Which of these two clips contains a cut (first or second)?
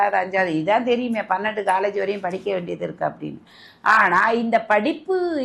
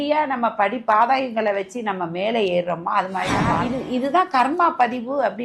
second